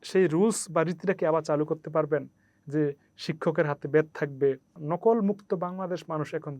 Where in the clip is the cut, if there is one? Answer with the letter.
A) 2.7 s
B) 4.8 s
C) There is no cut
B